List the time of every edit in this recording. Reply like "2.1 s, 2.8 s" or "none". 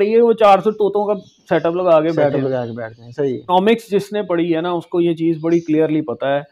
3.4 s